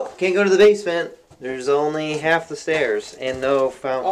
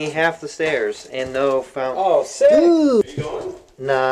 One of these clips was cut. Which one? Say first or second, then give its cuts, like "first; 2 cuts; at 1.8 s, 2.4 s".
second; 1 cut; at 3.0 s